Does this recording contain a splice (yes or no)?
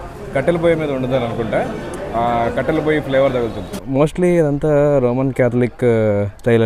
yes